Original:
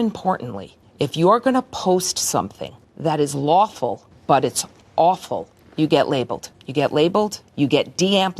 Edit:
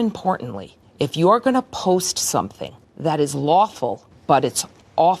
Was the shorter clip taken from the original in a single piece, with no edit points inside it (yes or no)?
yes